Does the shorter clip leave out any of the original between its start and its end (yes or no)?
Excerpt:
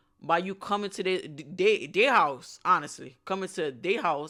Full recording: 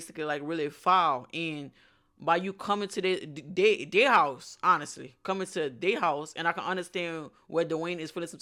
no